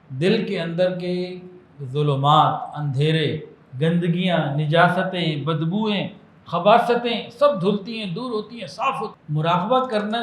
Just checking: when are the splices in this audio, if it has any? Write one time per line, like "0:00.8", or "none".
0:09.2